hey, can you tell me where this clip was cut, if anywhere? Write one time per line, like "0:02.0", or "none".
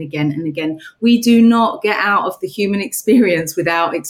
none

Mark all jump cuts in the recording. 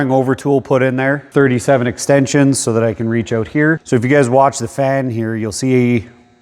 0:01.2
0:03.8

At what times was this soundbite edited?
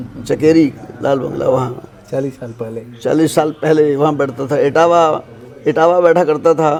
none

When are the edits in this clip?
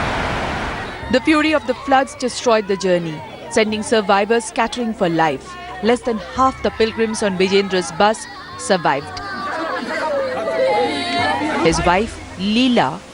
0:04.5

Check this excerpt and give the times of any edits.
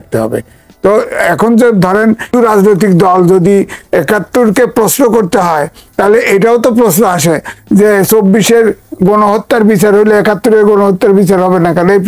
0:02.3

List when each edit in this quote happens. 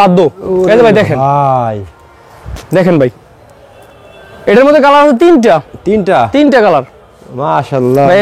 none

